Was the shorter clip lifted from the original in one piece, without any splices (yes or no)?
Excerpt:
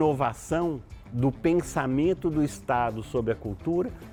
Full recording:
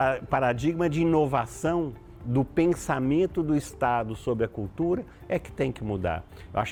yes